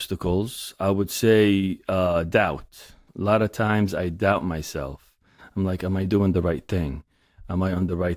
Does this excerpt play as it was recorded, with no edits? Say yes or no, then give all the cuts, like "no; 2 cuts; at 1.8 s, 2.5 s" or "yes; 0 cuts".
no; 1 cut; at 3.1 s